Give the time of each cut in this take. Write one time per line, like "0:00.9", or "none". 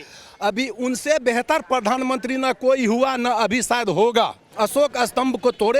none